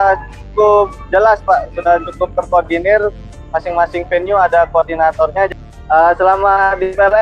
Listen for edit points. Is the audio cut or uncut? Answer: cut